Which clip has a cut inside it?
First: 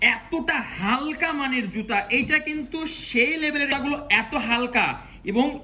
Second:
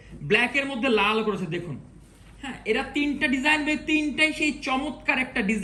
first; 1 cut; at 3.7 s

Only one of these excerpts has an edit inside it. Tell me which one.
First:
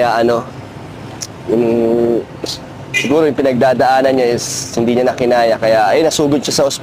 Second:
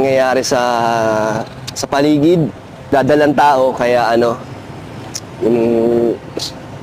second; 1 cut; at 2.9 s

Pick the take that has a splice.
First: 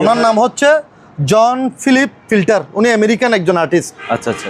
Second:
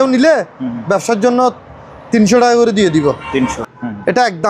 second; 1 cut; at 3.6 s

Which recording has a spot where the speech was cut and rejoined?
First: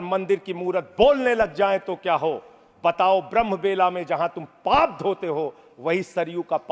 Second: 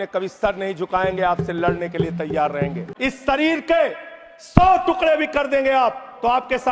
second; 1 cut; at 2.9 s

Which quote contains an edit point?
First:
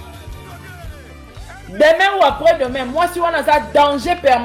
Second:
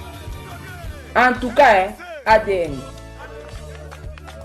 second; 2 cuts; at 1.1 s, 3.1 s

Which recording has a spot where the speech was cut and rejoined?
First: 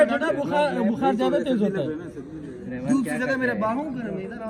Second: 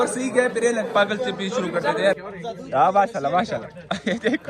second; 1 cut; at 2.2 s

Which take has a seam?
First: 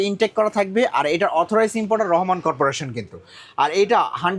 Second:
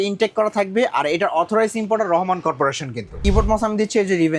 second; 1 cut; at 3.1 s

